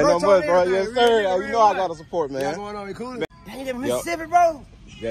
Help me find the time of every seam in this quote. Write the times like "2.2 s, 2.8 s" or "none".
3.3 s